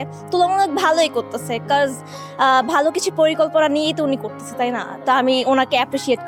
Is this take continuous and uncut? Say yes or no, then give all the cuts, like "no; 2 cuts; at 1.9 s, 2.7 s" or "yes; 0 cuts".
yes; 0 cuts